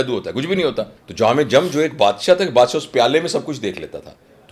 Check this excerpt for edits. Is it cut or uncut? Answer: cut